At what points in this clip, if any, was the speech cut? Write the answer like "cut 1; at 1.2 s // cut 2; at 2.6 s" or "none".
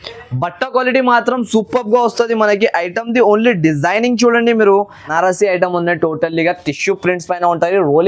cut 1; at 5.1 s